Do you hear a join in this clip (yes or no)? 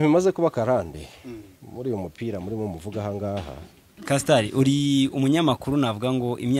yes